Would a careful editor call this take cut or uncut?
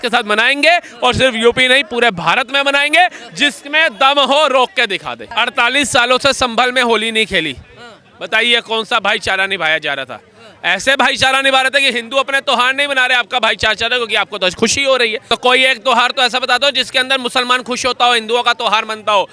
cut